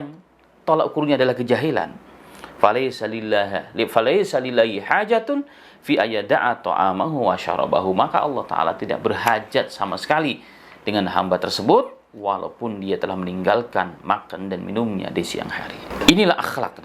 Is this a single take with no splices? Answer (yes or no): no